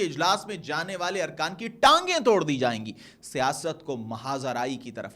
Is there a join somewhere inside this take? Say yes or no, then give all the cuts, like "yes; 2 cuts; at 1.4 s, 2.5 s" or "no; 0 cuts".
no; 0 cuts